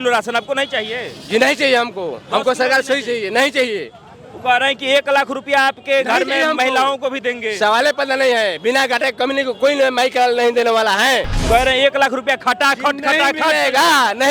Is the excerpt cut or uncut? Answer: cut